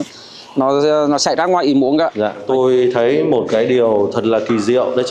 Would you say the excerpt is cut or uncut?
cut